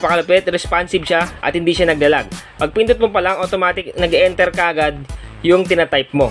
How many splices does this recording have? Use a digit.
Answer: 1